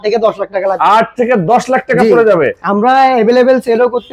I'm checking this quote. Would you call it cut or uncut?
uncut